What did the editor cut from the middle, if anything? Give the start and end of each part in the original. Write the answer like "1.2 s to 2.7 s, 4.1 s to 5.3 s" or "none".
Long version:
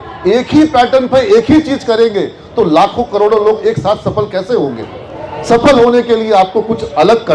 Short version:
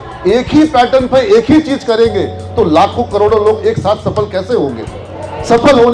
none